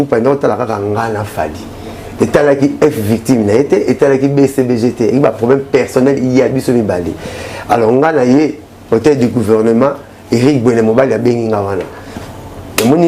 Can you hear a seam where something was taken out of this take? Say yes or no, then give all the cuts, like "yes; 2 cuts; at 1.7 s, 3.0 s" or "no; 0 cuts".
yes; 1 cut; at 12.2 s